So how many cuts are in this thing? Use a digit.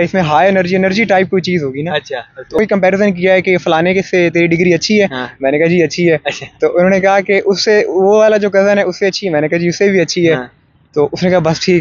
1